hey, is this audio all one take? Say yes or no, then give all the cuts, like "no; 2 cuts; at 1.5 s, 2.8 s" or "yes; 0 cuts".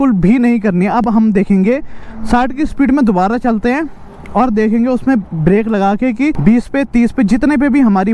yes; 0 cuts